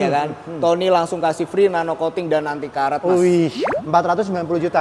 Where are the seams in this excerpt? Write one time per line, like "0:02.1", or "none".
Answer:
0:03.6